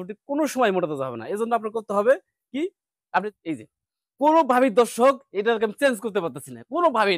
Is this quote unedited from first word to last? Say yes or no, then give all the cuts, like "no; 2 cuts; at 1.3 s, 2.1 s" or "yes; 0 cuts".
no; 1 cut; at 3.3 s